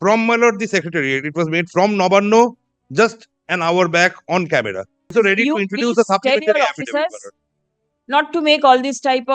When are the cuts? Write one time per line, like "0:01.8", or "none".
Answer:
0:05.1